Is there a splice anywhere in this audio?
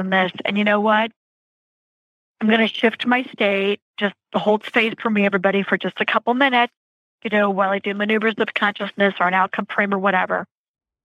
no; 0 cuts

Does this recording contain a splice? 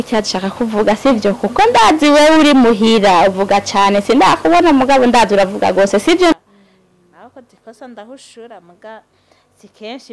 yes; 1 cut; at 6.3 s

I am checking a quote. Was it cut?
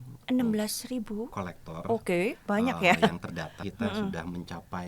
yes; 1 cut; at 3.6 s

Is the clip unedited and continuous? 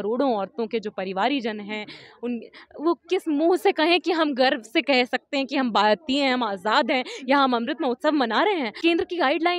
no; 1 cut; at 8.7 s

